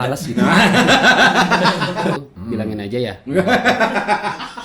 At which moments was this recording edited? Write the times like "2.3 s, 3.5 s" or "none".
2.4 s